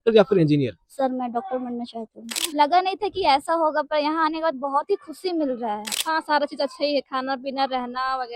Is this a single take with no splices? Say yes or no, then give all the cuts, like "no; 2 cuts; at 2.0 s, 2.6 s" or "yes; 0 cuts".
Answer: no; 2 cuts; at 2.3 s, 5.9 s